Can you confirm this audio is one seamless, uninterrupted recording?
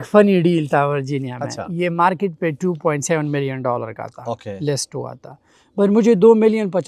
yes; 0 cuts

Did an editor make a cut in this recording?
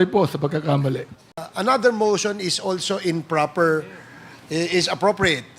yes; 1 cut; at 1.5 s

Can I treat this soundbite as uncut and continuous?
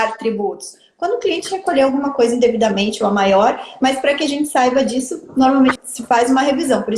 no; 1 cut; at 5.8 s

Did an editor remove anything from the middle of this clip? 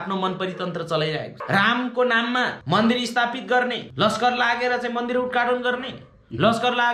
yes; 3 cuts; at 1.3 s, 2.6 s, 3.8 s

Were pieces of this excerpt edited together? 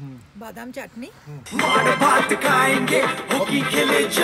yes; 1 cut; at 1.4 s

